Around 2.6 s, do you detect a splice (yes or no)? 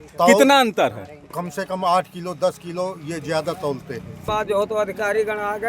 no